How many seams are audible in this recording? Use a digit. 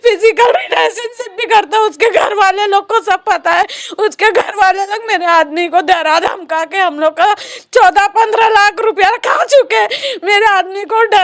0